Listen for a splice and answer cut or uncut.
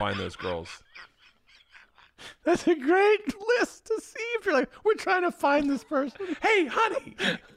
cut